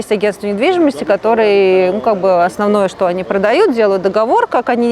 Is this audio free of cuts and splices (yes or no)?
yes